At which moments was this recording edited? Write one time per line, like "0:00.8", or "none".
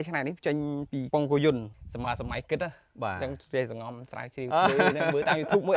none